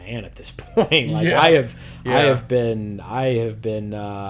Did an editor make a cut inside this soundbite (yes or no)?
no